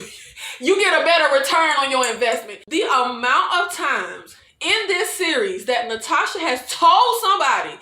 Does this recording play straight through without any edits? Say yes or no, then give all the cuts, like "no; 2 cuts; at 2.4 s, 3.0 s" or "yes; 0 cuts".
no; 1 cut; at 2.6 s